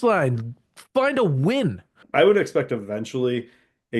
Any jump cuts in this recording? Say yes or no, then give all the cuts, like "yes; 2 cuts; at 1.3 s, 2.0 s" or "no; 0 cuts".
yes; 1 cut; at 2.0 s